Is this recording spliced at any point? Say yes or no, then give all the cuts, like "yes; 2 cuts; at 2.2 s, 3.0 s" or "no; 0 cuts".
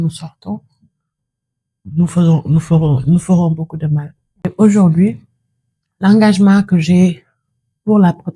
yes; 1 cut; at 4.5 s